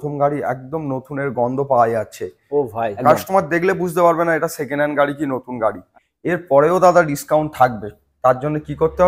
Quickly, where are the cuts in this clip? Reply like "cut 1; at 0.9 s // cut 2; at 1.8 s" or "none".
cut 1; at 3.0 s // cut 2; at 5.8 s